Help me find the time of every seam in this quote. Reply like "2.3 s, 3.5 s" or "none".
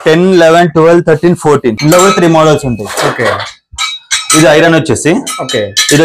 1.8 s